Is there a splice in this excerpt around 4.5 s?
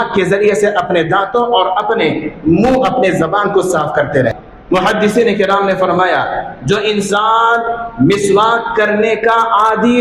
yes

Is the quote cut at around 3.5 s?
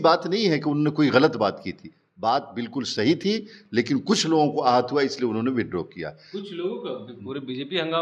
no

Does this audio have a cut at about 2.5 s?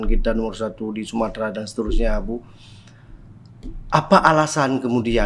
no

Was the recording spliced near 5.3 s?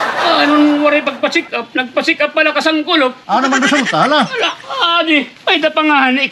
yes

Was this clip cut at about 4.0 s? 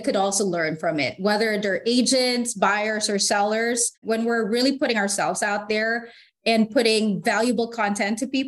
yes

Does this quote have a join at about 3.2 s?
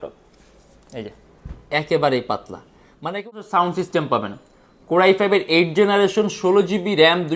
yes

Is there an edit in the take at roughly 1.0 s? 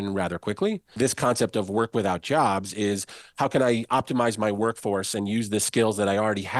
yes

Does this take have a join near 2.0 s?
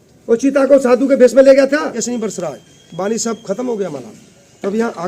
yes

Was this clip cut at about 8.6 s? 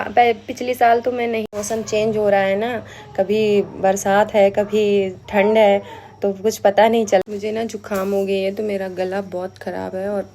no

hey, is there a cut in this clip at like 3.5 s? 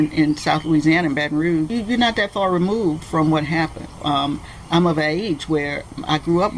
no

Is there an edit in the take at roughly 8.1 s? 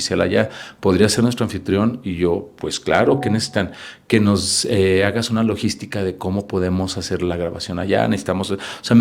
no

